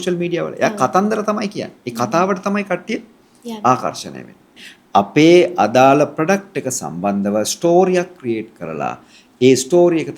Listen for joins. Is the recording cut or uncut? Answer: cut